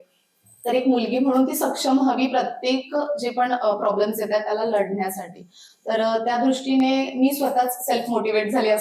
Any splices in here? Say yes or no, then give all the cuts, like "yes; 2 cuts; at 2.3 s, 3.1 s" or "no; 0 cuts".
no; 0 cuts